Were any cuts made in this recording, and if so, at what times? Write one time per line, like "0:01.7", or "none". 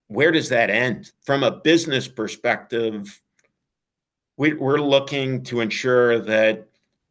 0:01.1